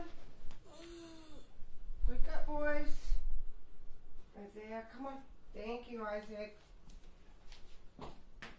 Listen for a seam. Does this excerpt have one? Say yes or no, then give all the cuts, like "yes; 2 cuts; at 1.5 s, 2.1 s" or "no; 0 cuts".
yes; 1 cut; at 2.8 s